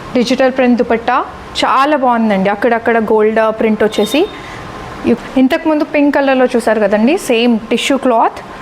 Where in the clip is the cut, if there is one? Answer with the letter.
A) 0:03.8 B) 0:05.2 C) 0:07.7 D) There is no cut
B